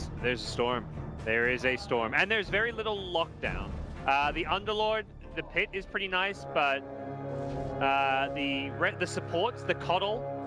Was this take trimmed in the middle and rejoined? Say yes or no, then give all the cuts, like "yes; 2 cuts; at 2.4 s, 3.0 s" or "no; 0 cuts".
yes; 1 cut; at 4.0 s